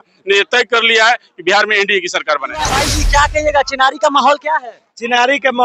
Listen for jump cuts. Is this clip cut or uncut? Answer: cut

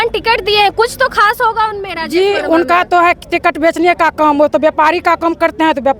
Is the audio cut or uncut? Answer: uncut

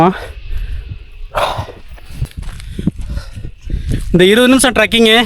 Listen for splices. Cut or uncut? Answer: cut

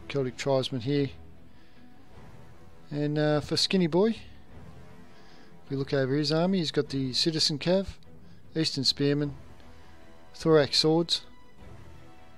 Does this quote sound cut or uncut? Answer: cut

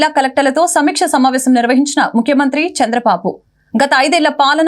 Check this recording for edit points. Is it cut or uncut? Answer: uncut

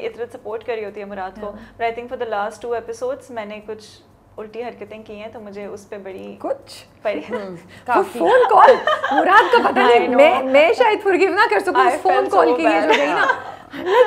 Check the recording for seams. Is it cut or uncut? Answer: uncut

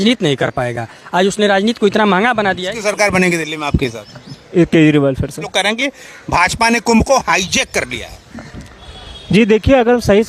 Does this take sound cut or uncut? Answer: cut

